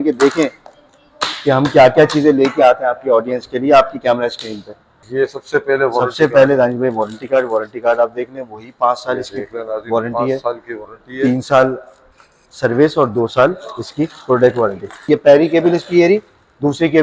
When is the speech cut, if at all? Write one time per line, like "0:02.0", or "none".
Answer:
0:05.0
0:15.0